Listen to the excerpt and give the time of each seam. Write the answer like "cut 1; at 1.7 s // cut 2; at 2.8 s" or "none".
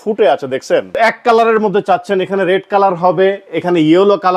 cut 1; at 0.9 s